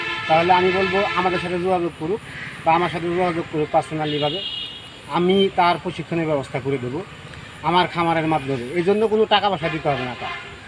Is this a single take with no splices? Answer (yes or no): yes